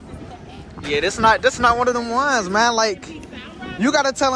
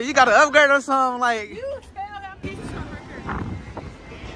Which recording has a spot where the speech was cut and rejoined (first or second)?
second